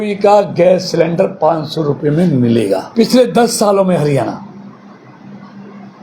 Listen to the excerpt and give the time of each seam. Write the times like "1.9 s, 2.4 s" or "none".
2.9 s